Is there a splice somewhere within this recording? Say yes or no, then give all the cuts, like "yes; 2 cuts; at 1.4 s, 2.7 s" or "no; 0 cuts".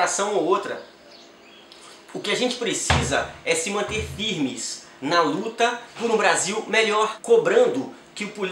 yes; 2 cuts; at 5.9 s, 7.2 s